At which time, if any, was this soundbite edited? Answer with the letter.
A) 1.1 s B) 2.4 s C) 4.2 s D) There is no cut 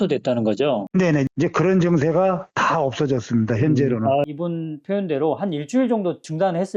C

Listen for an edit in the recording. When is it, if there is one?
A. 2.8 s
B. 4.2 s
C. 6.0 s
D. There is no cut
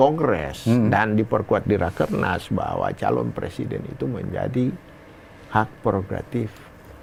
D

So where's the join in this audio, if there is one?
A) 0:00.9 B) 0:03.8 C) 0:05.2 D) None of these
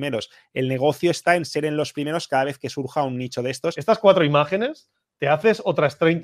B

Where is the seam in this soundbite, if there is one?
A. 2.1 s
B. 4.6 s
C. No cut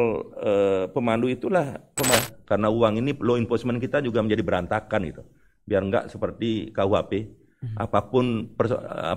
A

